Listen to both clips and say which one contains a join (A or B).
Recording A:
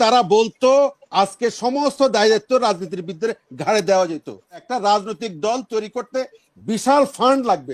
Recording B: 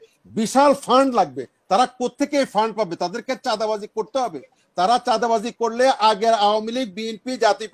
A